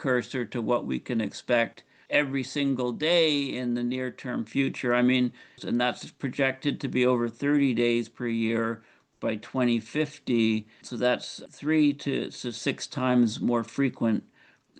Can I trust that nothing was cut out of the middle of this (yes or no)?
no